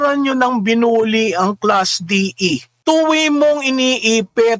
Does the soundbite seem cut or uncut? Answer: cut